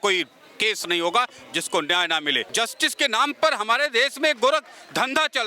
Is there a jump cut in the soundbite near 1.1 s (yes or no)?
no